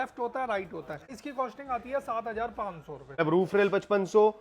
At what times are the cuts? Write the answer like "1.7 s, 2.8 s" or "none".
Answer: 1.2 s, 3.2 s